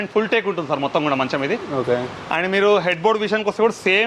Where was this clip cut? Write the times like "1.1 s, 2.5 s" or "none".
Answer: none